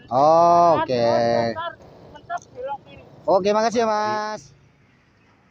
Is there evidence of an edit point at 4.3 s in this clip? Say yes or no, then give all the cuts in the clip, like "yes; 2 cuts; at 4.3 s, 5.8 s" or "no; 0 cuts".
yes; 1 cut; at 4.3 s